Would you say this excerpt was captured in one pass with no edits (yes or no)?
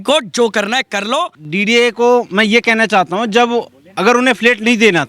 yes